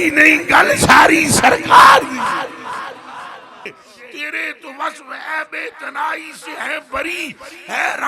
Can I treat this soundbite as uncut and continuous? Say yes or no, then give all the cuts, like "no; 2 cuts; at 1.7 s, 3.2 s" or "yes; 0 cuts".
no; 1 cut; at 3.7 s